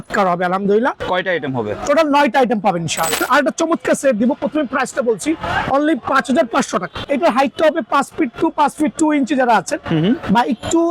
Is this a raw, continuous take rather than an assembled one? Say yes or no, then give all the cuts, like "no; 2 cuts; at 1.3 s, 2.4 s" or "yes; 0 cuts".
no; 3 cuts; at 1.0 s, 3.1 s, 7.0 s